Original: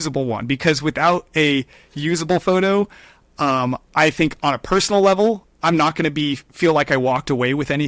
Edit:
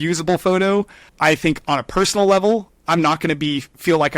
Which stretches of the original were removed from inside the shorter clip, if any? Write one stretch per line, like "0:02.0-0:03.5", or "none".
0:03.1-0:03.8